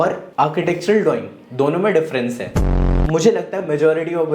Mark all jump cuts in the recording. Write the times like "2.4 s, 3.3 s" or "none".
2.6 s